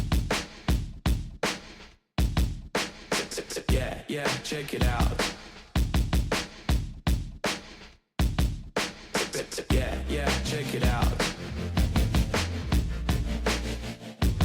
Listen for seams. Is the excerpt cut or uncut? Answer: uncut